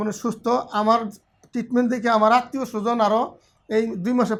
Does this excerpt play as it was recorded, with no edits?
yes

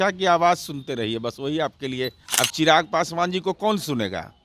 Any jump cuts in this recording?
yes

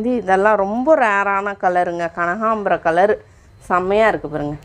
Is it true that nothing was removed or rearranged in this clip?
yes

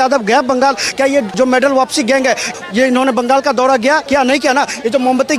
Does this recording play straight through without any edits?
no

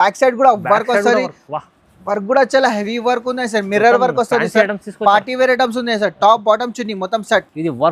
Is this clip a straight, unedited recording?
yes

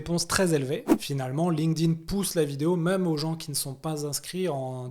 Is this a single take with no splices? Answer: no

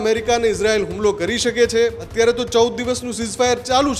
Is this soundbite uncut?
no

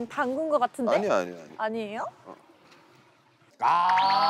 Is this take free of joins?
no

